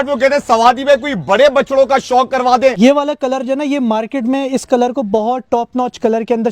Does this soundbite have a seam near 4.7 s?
no; 1 cut; at 2.8 s

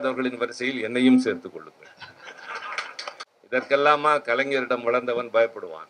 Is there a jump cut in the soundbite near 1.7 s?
no; 1 cut; at 3.3 s

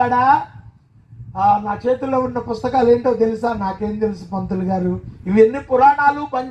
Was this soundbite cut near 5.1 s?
yes; 1 cut; at 5.1 s

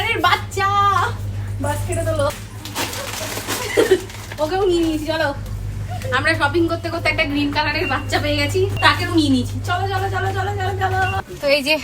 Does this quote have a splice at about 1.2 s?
no; 0 cuts

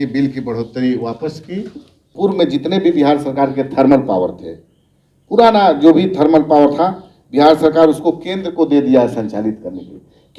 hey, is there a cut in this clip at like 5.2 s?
no; 1 cut; at 2.1 s

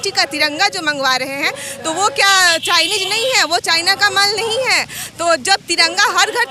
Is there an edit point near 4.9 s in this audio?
no; 0 cuts

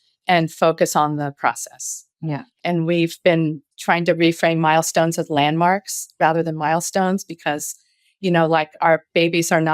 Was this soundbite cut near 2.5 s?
yes; 2 cuts; at 2.5 s, 3.7 s

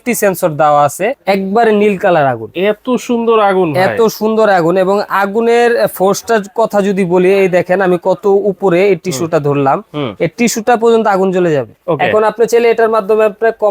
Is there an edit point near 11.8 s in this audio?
yes; 2 cuts; at 1.2 s, 11.8 s

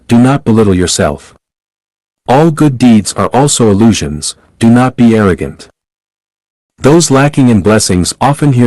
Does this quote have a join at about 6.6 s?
no; 1 cut; at 1.1 s

